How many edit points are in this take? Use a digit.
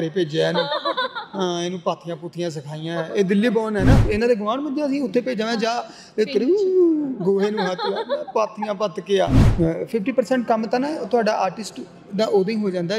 2